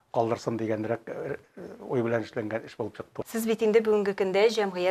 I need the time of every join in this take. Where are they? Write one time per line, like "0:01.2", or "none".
0:03.3